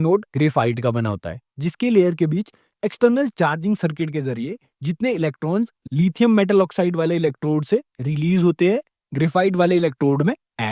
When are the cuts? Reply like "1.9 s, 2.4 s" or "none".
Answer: none